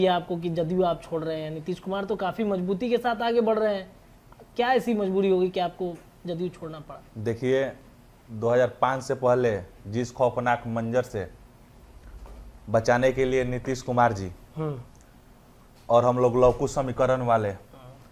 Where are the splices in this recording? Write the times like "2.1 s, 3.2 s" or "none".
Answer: none